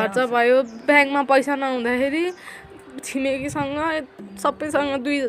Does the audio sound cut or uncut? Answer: uncut